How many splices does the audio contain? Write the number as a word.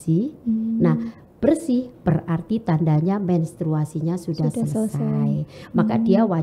zero